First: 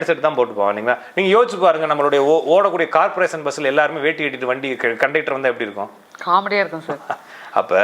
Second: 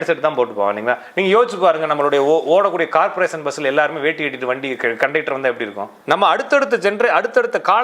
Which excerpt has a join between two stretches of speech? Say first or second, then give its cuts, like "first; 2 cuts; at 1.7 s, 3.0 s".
second; 1 cut; at 5.9 s